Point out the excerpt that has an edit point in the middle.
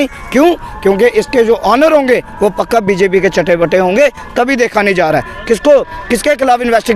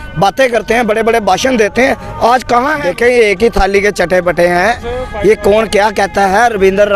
second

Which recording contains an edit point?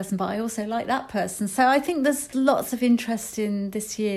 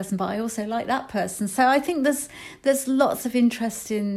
first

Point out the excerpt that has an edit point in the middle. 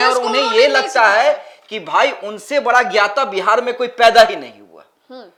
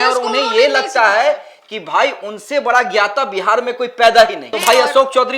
second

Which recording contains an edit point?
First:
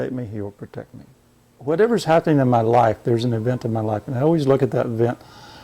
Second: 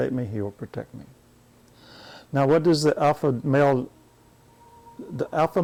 first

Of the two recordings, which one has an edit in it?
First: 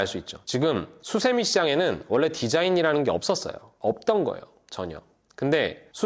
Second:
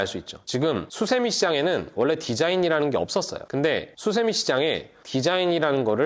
second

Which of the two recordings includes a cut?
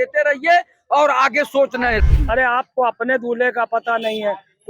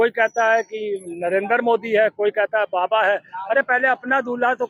first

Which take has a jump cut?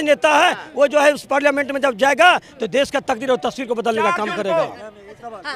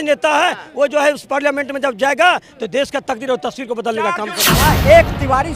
second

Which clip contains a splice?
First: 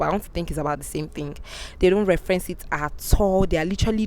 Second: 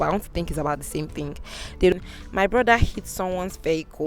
second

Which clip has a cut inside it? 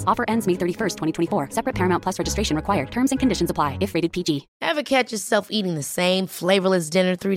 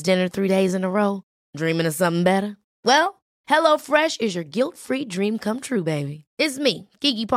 first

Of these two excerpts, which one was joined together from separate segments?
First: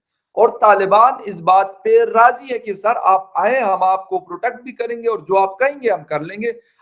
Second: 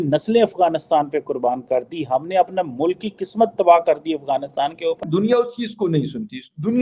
second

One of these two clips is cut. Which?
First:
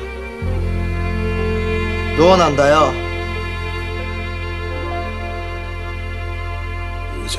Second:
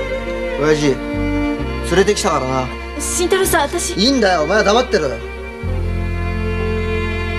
first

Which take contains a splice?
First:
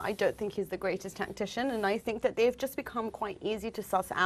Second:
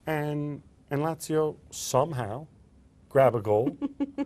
second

